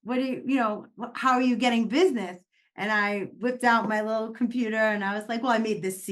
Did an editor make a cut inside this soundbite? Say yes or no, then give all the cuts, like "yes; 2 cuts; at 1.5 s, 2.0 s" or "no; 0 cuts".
no; 0 cuts